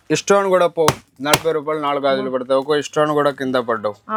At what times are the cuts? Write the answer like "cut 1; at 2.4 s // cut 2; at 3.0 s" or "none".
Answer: none

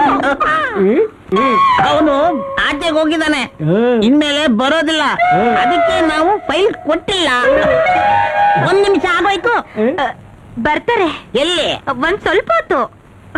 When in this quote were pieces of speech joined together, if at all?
cut 1; at 1.3 s

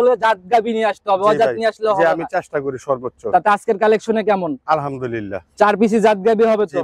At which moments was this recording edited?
none

